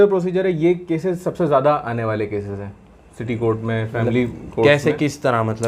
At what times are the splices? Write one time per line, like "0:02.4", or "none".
none